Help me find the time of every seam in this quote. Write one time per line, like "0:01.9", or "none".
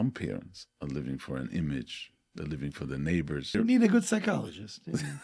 0:03.5